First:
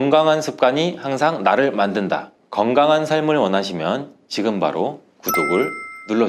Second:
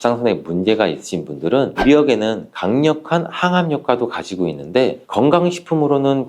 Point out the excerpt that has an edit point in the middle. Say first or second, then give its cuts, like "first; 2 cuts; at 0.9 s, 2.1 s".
second; 1 cut; at 1.7 s